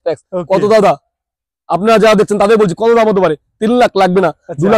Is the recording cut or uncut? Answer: uncut